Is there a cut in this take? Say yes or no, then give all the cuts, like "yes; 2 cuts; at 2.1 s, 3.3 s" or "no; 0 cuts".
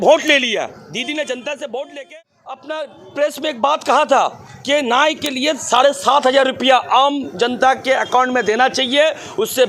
yes; 1 cut; at 2.0 s